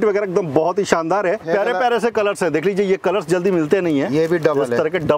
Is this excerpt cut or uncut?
cut